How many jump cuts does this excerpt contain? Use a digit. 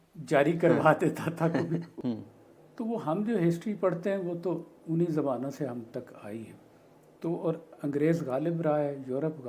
1